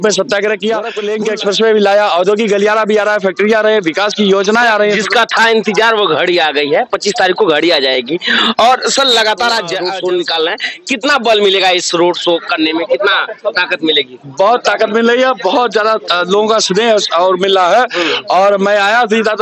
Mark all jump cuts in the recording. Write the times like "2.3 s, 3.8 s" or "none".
1.0 s, 9.7 s